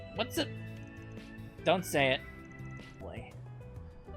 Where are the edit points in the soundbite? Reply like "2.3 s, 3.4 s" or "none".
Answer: 3.0 s